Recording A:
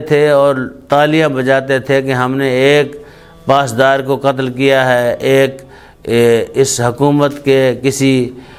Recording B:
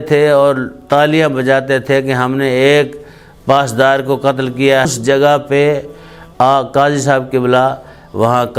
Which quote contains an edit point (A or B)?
B